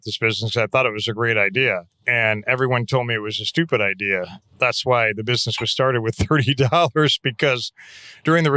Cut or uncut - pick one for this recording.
cut